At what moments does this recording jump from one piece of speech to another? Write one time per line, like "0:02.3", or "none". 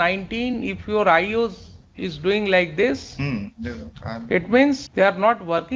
0:04.9